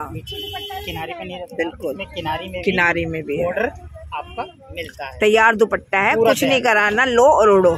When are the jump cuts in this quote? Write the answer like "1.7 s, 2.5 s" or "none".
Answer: none